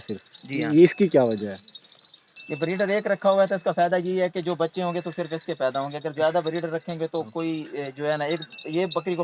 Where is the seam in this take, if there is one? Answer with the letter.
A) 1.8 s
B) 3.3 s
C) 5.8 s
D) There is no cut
D